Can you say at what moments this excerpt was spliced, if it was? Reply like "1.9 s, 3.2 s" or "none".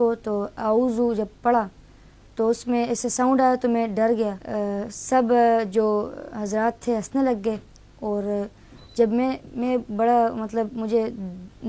4.4 s